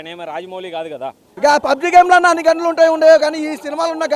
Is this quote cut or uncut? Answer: cut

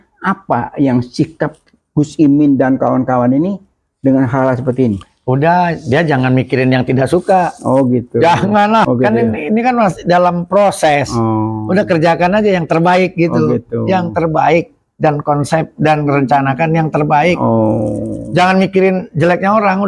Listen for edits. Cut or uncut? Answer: cut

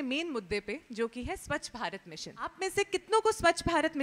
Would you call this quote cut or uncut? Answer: cut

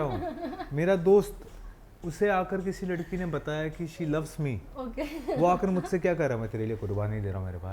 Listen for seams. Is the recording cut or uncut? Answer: uncut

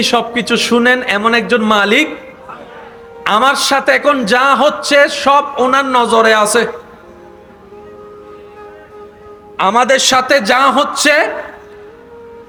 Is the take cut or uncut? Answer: uncut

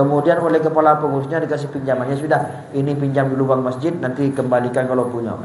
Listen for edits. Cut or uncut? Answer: uncut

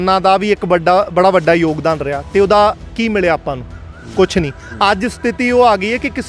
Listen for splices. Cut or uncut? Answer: uncut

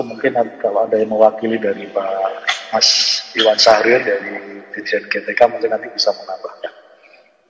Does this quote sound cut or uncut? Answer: uncut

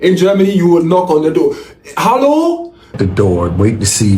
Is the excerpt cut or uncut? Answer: cut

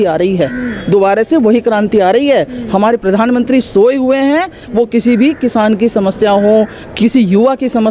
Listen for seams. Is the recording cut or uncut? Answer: uncut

